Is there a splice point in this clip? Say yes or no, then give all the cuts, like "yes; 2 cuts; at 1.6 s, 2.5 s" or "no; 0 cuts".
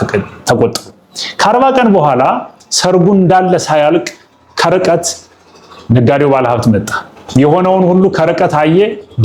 no; 0 cuts